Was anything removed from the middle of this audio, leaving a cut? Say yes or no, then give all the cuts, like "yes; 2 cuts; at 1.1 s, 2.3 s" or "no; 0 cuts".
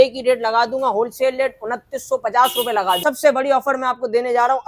yes; 1 cut; at 3.0 s